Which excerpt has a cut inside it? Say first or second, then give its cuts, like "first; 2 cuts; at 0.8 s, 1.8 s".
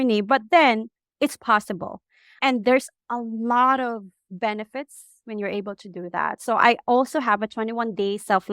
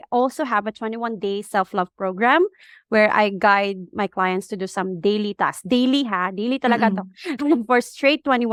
first; 3 cuts; at 1.0 s, 3.0 s, 4.2 s